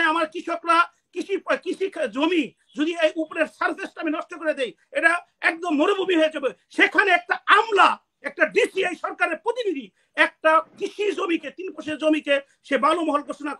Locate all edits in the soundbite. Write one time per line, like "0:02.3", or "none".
none